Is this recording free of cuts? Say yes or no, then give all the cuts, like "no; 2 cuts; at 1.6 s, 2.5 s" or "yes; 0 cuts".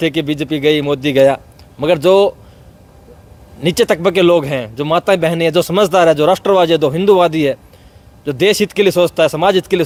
yes; 0 cuts